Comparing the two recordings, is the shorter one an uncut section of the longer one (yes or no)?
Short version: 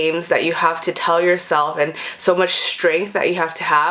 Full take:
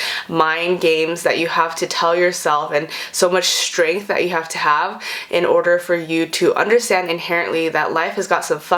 yes